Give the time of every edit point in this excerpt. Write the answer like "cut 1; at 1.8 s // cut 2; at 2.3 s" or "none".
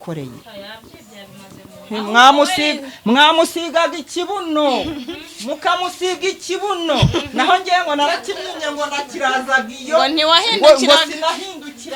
none

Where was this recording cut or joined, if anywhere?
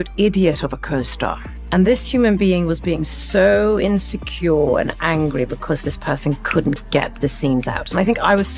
cut 1; at 1.0 s

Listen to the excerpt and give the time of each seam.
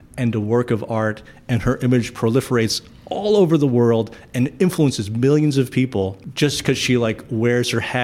cut 1; at 6.2 s

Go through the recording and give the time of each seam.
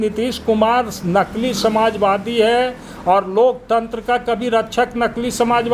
none

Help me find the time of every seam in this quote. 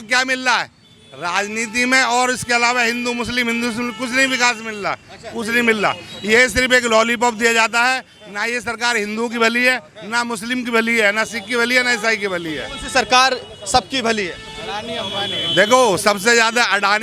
none

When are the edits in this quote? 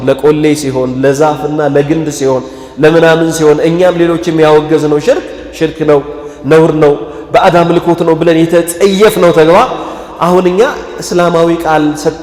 none

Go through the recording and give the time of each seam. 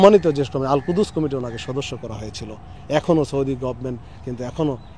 none

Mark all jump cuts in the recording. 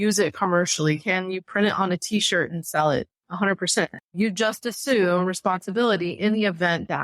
cut 1; at 4.0 s

